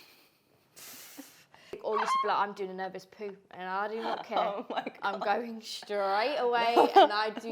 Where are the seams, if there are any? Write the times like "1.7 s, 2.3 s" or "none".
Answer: 1.8 s